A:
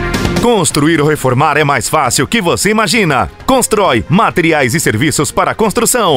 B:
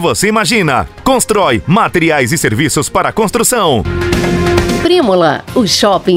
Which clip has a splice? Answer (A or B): B